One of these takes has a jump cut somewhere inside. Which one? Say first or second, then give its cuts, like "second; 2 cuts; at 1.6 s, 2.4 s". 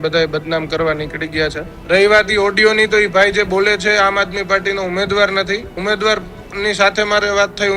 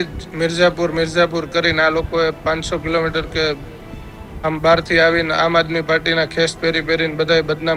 first; 2 cuts; at 1.7 s, 5.8 s